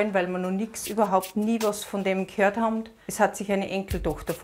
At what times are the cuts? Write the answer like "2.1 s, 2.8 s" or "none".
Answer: 3.0 s